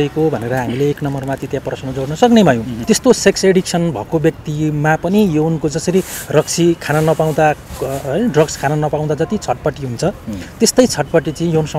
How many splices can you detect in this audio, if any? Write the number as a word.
one